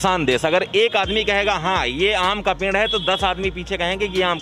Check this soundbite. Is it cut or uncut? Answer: uncut